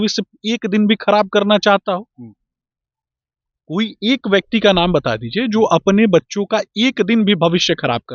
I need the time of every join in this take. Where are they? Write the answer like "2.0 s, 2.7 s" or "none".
none